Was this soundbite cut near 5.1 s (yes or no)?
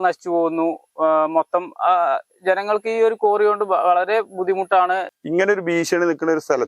yes